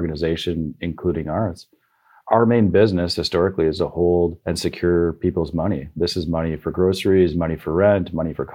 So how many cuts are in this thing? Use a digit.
2